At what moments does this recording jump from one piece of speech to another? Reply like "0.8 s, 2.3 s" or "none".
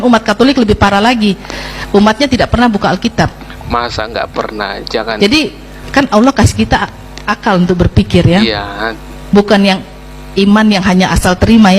5.9 s